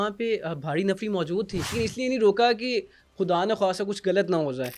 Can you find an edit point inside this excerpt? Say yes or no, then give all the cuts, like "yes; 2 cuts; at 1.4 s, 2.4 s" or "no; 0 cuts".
yes; 1 cut; at 1.8 s